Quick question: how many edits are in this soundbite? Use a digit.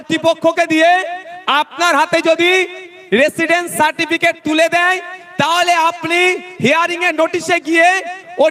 0